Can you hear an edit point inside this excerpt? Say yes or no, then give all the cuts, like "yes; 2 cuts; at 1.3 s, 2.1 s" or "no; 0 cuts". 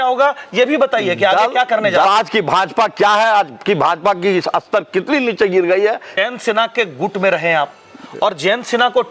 yes; 2 cuts; at 2.1 s, 6.2 s